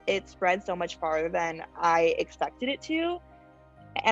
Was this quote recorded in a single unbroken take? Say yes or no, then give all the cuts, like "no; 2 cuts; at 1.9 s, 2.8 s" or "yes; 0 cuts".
yes; 0 cuts